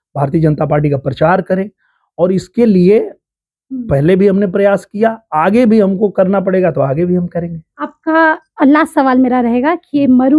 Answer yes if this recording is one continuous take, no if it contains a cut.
yes